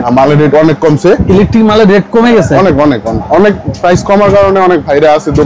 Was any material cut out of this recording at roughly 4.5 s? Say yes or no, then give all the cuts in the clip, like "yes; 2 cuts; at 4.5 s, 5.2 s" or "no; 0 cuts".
no; 2 cuts; at 1.2 s, 3.3 s